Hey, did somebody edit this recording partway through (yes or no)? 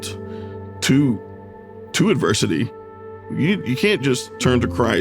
yes